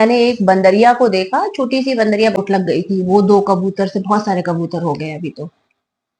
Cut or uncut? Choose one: cut